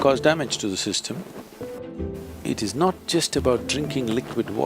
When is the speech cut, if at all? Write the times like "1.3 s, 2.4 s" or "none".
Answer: 1.8 s

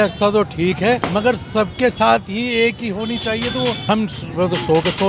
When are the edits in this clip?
1.0 s, 3.8 s

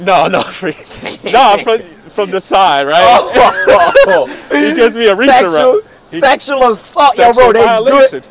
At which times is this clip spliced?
none

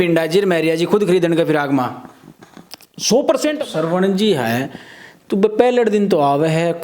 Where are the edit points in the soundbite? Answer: 3.6 s

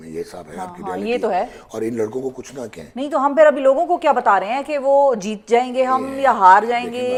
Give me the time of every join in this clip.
none

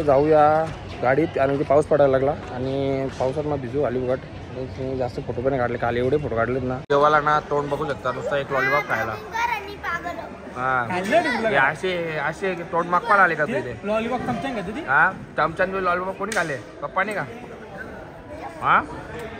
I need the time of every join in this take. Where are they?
6.8 s

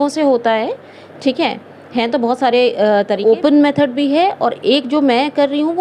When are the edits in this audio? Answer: 3.2 s

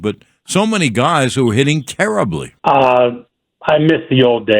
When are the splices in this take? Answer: 2.5 s

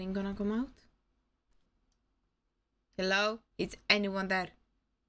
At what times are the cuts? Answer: 1.6 s, 3.5 s

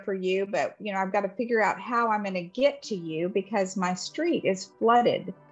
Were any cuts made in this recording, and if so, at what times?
none

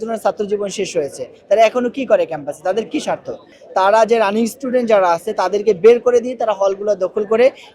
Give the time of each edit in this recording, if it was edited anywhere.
3.5 s

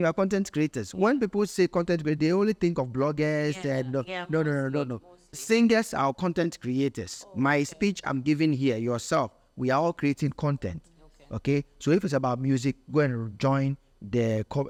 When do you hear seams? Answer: none

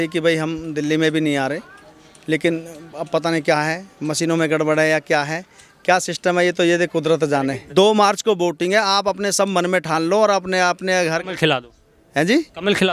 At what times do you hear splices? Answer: 7.6 s

